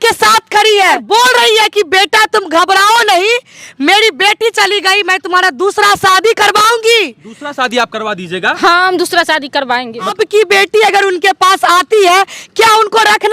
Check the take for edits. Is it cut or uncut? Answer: cut